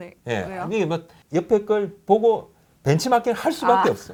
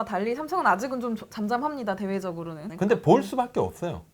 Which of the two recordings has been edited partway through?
second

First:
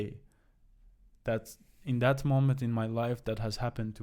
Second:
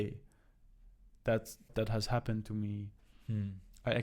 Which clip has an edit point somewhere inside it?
second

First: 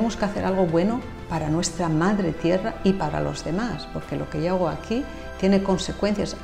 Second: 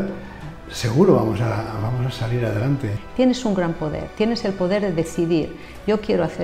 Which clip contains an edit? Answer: second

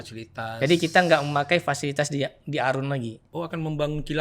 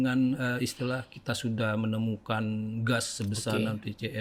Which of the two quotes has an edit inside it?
first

